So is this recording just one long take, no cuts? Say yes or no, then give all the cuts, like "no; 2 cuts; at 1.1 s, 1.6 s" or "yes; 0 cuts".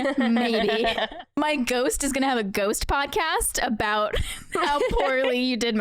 no; 1 cut; at 1.3 s